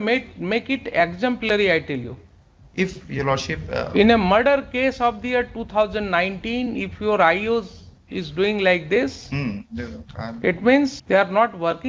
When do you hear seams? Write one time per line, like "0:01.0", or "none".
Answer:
0:11.0